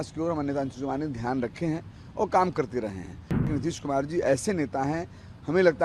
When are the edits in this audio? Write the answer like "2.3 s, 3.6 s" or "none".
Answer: 3.5 s